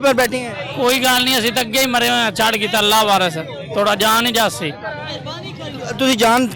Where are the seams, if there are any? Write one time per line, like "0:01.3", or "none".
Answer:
none